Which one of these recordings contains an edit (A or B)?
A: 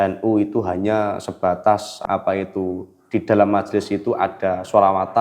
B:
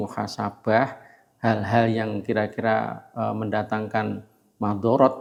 A